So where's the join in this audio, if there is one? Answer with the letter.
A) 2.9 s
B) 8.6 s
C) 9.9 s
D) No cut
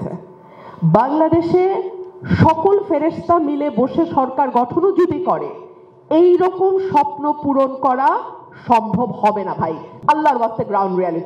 C